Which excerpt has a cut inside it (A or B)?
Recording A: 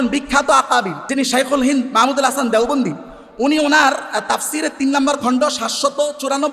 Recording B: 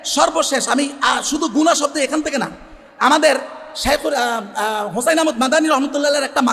A